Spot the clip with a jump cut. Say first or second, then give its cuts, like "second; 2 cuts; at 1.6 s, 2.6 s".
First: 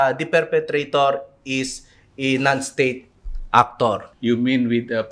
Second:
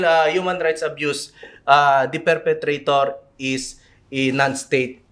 first; 1 cut; at 4.1 s